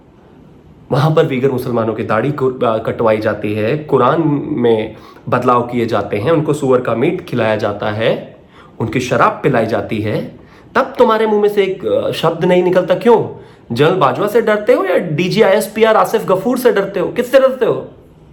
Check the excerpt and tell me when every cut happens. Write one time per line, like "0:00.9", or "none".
none